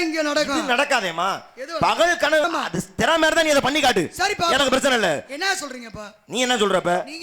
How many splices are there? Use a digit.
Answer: 1